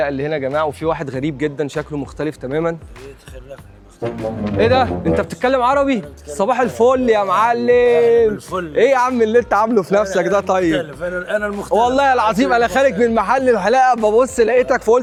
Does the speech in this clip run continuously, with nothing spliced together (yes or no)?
yes